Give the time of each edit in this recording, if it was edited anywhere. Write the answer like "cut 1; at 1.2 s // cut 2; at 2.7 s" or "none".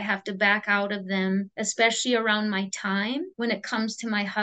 cut 1; at 1.6 s // cut 2; at 3.3 s